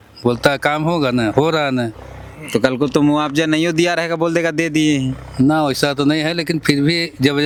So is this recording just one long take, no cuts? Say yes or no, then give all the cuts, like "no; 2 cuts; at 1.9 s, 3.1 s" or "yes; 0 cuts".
yes; 0 cuts